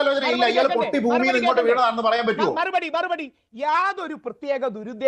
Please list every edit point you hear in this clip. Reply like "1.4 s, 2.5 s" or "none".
2.5 s

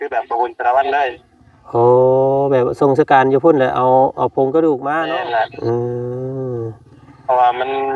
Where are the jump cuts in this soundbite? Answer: 4.9 s

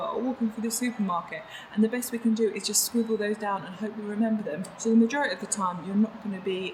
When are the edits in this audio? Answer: 4.7 s

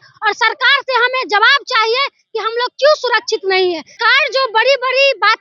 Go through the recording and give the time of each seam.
4.0 s

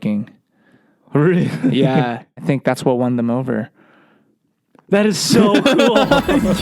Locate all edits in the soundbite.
2.4 s

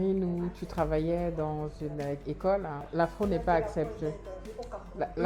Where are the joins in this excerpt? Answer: 2.9 s

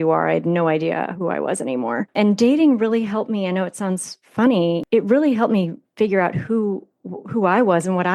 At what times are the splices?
2.1 s, 4.8 s

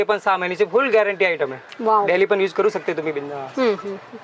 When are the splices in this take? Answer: none

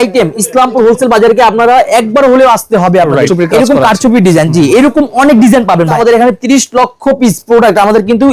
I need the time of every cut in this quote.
3.3 s, 5.9 s

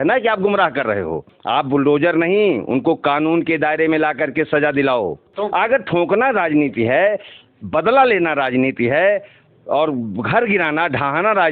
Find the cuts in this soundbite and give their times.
1.3 s, 5.3 s

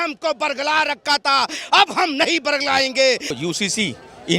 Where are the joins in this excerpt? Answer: 3.4 s

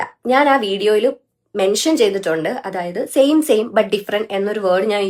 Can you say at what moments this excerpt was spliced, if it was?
none

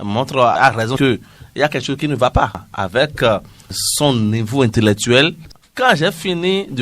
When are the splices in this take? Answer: 2.6 s, 5.6 s

